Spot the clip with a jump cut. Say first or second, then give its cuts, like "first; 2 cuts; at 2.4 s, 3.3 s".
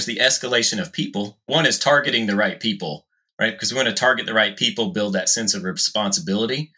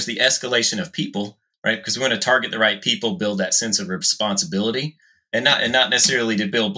second; 1 cut; at 1.4 s